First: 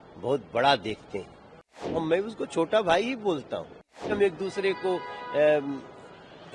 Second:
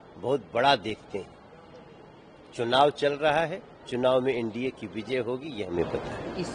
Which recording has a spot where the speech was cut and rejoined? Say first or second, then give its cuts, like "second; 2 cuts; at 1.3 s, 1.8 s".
first; 2 cuts; at 2.0 s, 4.1 s